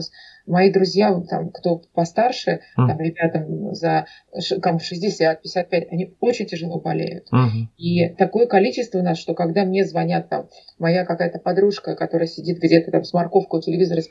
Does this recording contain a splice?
no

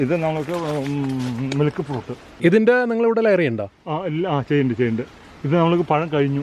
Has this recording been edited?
yes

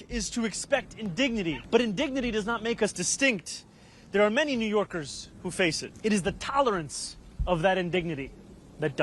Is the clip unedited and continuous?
no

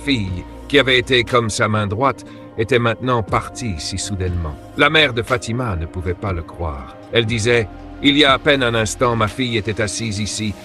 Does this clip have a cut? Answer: no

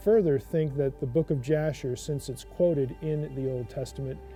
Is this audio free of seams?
yes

